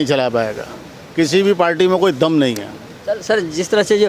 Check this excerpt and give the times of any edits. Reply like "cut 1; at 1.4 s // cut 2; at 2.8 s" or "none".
none